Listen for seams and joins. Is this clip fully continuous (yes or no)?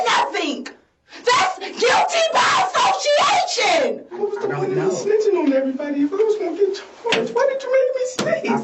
no